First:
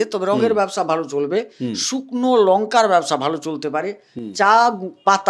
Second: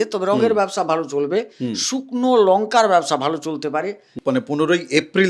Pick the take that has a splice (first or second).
second